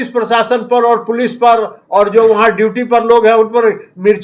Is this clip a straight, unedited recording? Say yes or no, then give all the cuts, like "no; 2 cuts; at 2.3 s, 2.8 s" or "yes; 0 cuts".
yes; 0 cuts